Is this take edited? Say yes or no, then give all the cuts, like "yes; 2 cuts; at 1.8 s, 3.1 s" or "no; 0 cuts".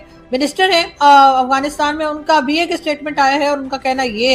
no; 0 cuts